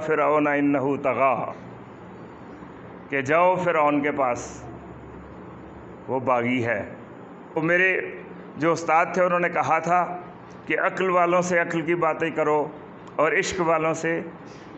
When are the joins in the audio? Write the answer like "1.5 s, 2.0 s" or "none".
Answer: 7.6 s